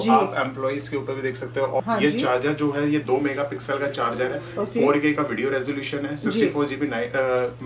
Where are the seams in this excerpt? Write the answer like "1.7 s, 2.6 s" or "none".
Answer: 1.8 s